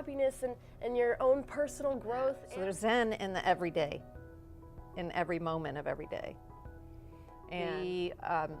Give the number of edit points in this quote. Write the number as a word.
two